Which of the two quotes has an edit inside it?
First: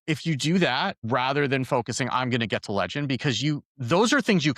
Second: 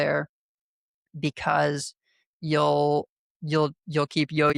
first; 2 cuts; at 1.0 s, 3.7 s

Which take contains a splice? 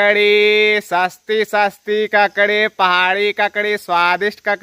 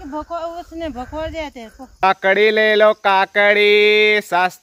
second; 1 cut; at 2.0 s

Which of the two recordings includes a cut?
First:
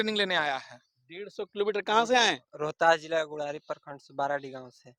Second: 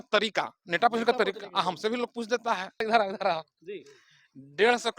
second; 1 cut; at 2.9 s

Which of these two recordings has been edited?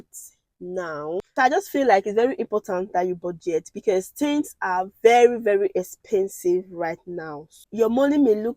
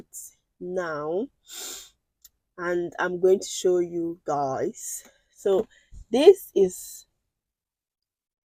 first; 2 cuts; at 1.3 s, 7.6 s

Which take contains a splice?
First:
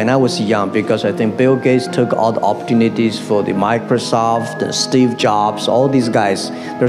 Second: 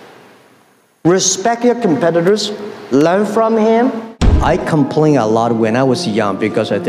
second; 1 cut; at 4.2 s

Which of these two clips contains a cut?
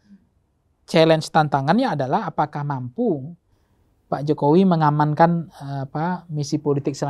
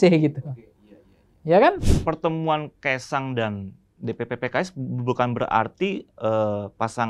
second; 1 cut; at 1.9 s

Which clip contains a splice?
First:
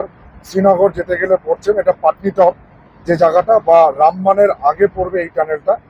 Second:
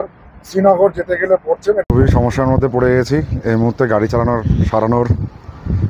second; 1 cut; at 1.8 s

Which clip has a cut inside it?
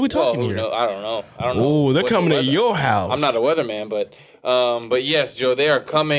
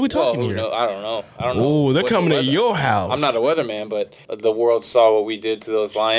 second; 1 cut; at 4.2 s

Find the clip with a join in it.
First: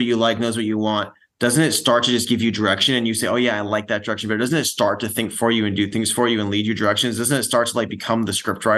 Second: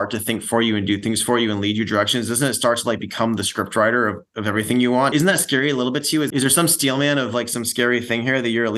second; 2 cuts; at 5.1 s, 6.3 s

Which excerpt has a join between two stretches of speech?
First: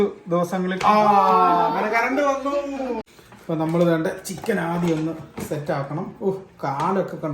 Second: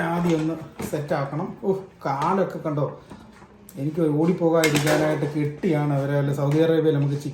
first; 1 cut; at 3.0 s

